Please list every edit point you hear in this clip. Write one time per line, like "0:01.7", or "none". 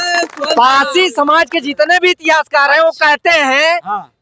none